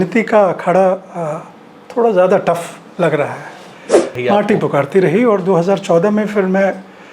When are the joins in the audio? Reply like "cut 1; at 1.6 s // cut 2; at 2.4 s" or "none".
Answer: cut 1; at 4.2 s